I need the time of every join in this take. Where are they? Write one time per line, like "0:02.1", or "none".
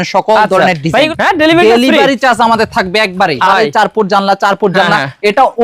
0:01.1
0:03.5